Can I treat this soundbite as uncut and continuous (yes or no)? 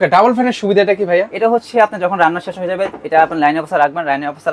yes